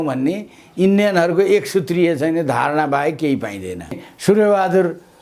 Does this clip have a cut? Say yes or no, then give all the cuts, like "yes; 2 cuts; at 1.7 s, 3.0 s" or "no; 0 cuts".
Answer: yes; 1 cut; at 4.1 s